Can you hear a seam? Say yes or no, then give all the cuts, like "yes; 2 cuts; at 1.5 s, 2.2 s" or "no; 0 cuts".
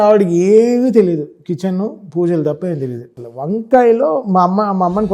yes; 1 cut; at 3.2 s